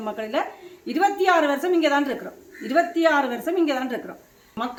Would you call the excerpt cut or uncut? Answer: uncut